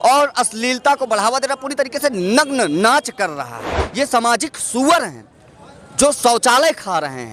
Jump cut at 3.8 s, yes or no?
yes